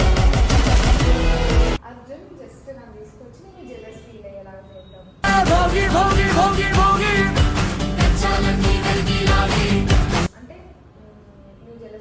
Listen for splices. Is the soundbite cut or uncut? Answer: cut